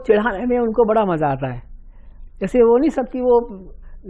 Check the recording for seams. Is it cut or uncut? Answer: uncut